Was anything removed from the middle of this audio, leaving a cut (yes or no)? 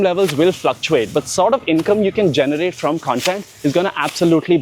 no